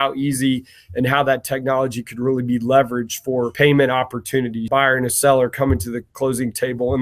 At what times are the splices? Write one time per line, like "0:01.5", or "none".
0:03.5
0:04.6